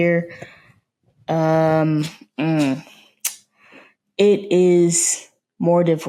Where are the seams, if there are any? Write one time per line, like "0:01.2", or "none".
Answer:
none